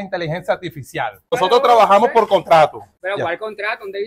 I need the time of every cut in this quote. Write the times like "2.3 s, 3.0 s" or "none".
none